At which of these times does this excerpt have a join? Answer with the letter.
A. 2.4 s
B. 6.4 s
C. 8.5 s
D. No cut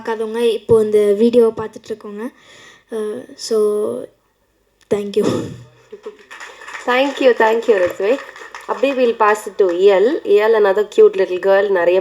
D